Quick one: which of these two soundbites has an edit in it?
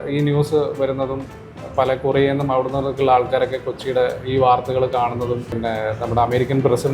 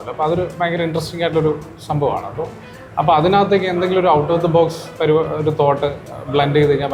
first; 1 cut; at 5.6 s

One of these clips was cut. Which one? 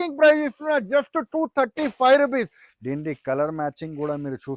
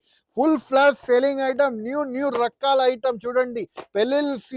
first; 1 cut; at 2.6 s

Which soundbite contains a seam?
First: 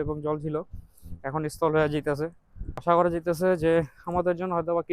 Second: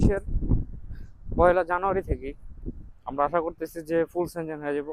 first; 1 cut; at 2.8 s

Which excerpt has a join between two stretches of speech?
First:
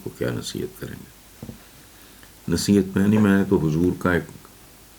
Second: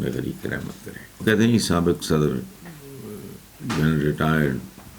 second; 1 cut; at 1.2 s

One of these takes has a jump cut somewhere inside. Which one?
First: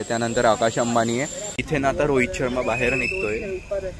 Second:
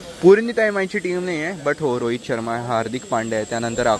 first; 1 cut; at 1.6 s

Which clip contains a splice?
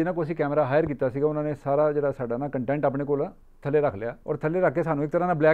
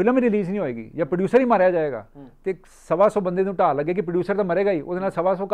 first; 2 cuts; at 3.5 s, 4.1 s

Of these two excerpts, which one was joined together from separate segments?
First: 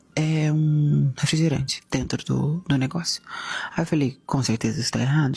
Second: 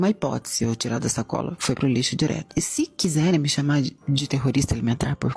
second; 1 cut; at 2.4 s

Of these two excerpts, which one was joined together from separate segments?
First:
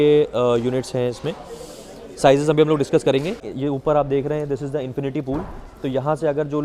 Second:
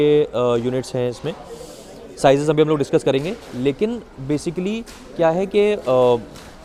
first; 1 cut; at 3.5 s

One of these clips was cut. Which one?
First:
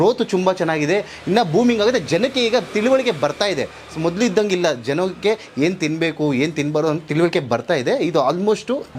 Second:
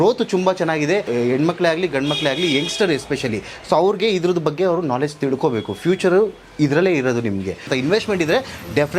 second; 2 cuts; at 1.1 s, 7.7 s

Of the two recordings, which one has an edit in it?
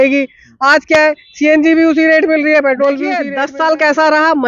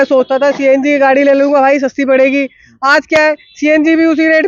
first; 1 cut; at 3.2 s

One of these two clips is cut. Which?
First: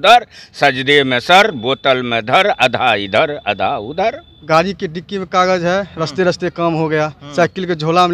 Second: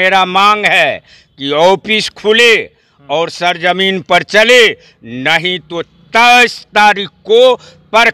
first; 1 cut; at 4.3 s

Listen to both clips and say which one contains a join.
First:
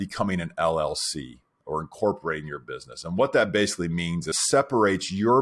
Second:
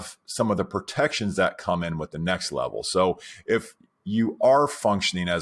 first; 1 cut; at 4.3 s

